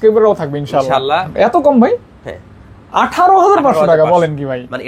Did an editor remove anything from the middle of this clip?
yes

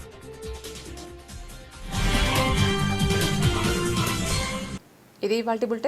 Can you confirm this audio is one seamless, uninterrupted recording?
yes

